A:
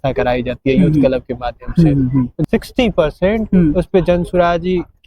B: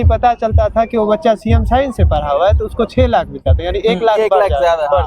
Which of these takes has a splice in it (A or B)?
A